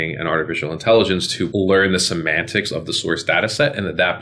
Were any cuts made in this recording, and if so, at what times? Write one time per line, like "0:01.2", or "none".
0:01.4